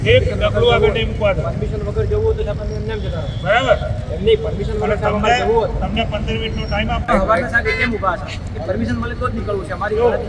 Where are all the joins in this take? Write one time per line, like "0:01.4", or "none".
none